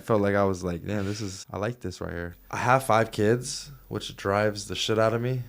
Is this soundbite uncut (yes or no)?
no